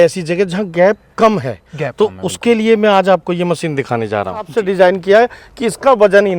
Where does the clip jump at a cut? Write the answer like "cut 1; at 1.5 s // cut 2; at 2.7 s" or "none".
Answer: cut 1; at 4.5 s